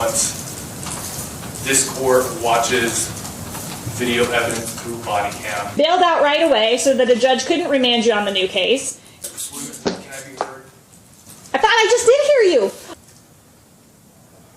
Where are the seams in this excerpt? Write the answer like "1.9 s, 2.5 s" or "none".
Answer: 5.8 s, 9.2 s, 12.8 s